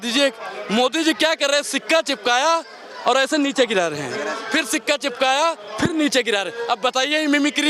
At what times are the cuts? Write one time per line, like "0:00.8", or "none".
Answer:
none